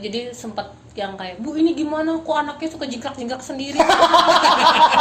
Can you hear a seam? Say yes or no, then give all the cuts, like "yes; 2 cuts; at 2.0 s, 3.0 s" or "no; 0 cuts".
no; 0 cuts